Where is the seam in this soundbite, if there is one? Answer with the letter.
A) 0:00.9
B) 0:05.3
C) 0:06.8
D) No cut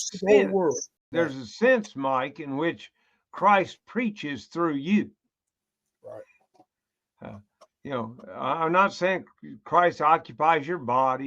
A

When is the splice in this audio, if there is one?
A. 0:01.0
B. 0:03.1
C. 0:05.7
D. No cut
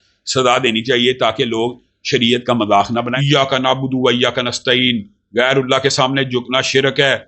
B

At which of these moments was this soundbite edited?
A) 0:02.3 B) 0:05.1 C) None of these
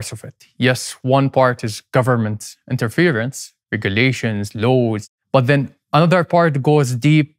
B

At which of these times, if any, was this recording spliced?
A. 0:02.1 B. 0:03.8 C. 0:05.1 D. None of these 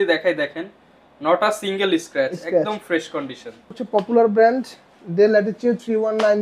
B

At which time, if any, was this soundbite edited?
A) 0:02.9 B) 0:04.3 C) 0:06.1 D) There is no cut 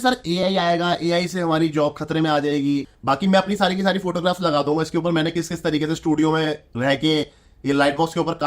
A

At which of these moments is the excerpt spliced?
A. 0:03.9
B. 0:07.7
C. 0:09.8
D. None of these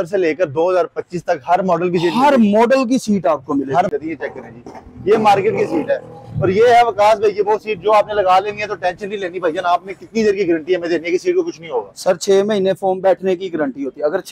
A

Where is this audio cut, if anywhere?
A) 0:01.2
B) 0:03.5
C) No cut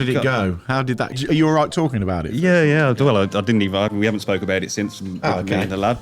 A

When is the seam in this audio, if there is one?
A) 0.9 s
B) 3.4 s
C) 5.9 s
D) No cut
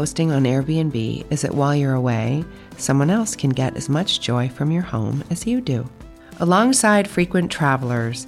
D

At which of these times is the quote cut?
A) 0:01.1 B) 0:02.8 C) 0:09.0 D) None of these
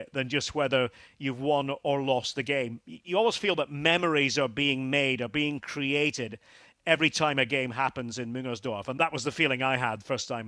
C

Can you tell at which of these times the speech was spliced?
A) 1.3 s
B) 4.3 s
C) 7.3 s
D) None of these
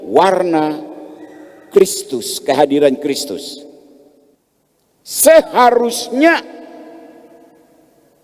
B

